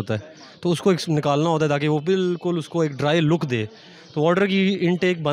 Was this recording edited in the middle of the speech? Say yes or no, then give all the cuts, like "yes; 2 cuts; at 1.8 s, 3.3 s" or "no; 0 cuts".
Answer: no; 0 cuts